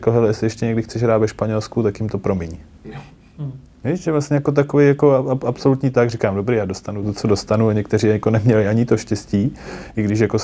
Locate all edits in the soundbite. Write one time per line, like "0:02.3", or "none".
none